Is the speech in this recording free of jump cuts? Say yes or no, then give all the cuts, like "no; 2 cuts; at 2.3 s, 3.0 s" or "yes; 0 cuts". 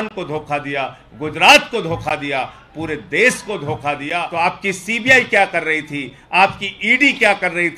no; 1 cut; at 4.2 s